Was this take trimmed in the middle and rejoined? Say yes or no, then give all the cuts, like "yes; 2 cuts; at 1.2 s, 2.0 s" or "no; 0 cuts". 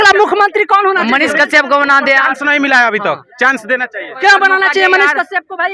no; 0 cuts